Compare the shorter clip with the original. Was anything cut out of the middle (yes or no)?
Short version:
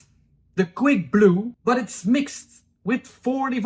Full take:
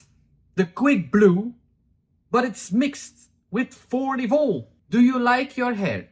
yes